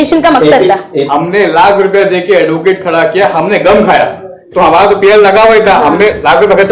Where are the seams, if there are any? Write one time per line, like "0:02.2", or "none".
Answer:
0:01.1
0:04.5